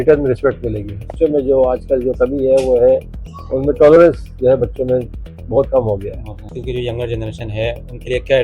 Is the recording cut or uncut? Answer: cut